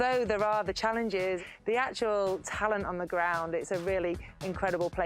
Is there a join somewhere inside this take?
yes; 1 cut; at 1.4 s

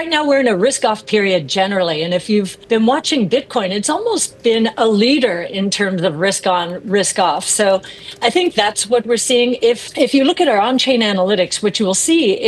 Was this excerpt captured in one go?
no; 2 cuts; at 2.6 s, 9.9 s

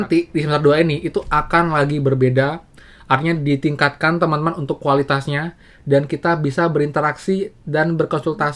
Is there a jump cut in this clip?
no; 0 cuts

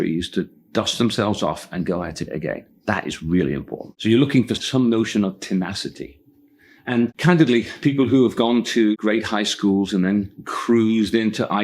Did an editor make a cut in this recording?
no; 0 cuts

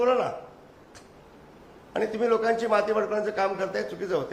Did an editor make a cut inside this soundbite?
no; 0 cuts

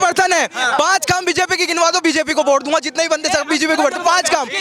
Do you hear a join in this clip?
no; 0 cuts

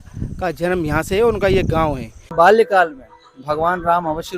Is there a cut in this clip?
yes; 1 cut; at 2.3 s

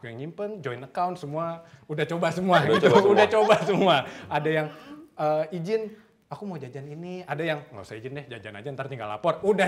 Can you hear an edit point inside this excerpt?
no; 0 cuts

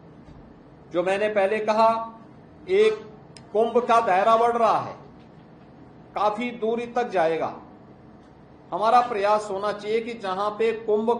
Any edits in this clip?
no; 0 cuts

